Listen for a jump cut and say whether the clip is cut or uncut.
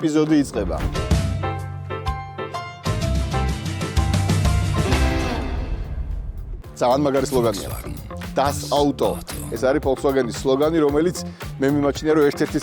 cut